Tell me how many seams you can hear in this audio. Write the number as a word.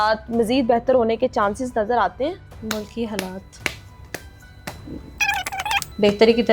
two